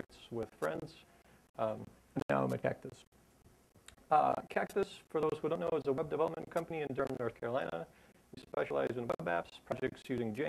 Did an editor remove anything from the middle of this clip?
yes; 1 cut; at 7.9 s

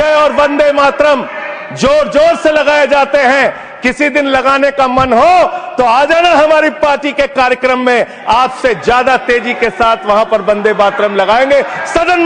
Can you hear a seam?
no; 0 cuts

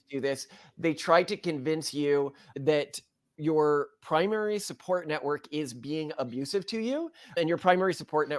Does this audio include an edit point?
yes; 1 cut; at 3.3 s

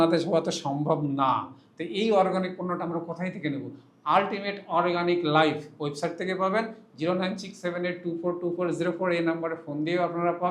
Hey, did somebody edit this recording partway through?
no; 0 cuts

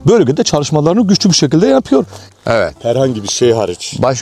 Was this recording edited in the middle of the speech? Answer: yes; 1 cut; at 2.2 s

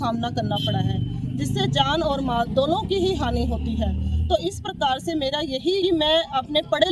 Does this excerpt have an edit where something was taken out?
yes; 1 cut; at 5.8 s

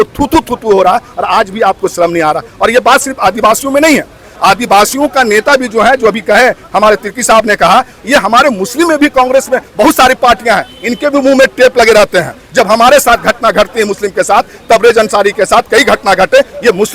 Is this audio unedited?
yes; 0 cuts

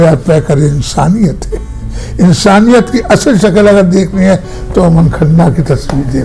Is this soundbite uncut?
yes; 0 cuts

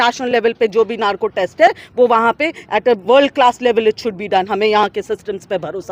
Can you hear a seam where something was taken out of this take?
no; 0 cuts

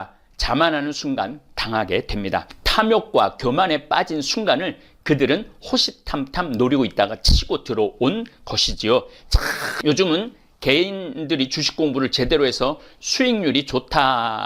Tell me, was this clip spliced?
yes; 1 cut; at 9.7 s

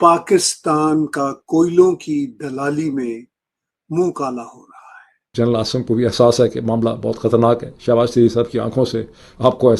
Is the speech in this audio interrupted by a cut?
yes; 1 cut; at 5.3 s

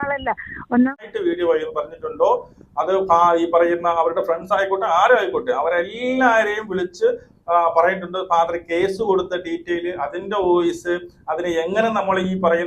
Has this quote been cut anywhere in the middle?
yes; 1 cut; at 0.9 s

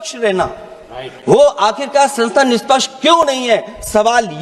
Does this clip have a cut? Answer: no; 0 cuts

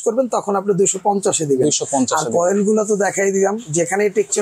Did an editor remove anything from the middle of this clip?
no; 0 cuts

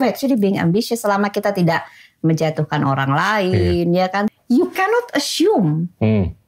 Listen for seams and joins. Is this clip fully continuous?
no; 1 cut; at 4.3 s

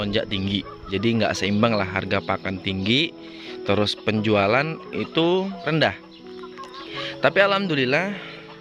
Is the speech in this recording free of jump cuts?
no; 2 cuts; at 0.8 s, 5.6 s

